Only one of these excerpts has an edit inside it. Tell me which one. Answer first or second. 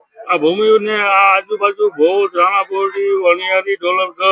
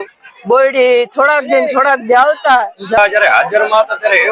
second